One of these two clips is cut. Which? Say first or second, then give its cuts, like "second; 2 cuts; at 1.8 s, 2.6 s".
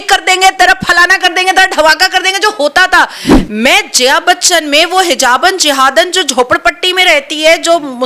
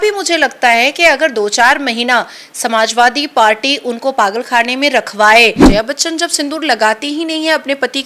second; 1 cut; at 5.6 s